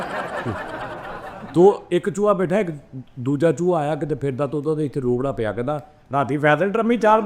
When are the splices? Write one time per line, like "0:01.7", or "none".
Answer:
0:01.3